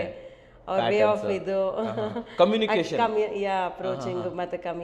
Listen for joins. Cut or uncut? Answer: uncut